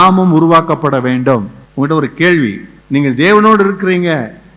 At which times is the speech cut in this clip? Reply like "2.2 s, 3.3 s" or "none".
1.6 s, 2.7 s

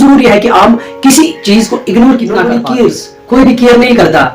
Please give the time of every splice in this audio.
2.6 s

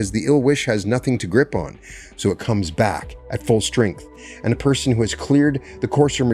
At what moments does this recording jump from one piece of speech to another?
none

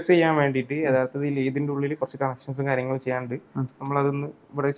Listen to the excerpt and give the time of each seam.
none

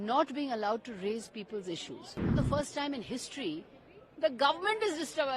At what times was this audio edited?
2.3 s

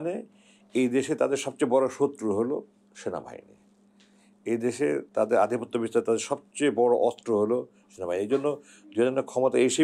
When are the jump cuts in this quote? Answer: none

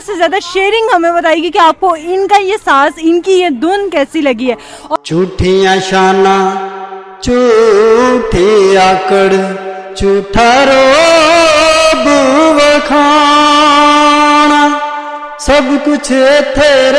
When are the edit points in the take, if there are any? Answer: 4.9 s

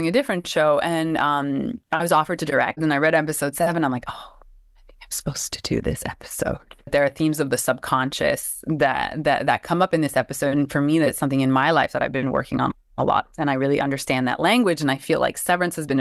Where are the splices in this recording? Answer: 2.8 s, 6.9 s

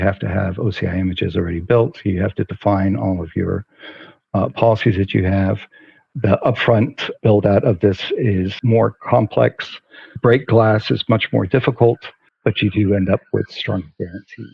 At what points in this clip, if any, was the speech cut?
8.5 s

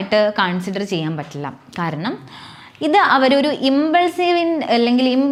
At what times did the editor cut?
none

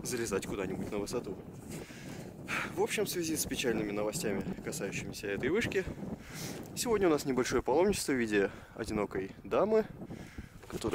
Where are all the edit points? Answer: 1.7 s

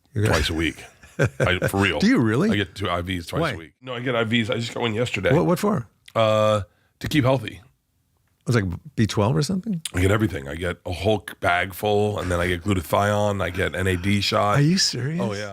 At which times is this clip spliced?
none

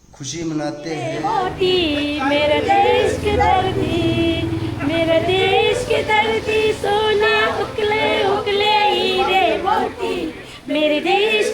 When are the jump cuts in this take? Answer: 1.2 s

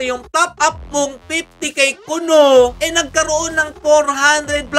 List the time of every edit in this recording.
none

